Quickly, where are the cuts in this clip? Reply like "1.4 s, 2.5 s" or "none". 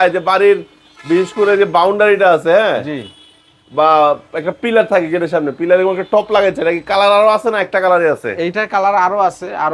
none